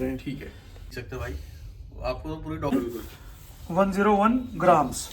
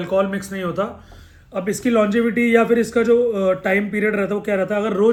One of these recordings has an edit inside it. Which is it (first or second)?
first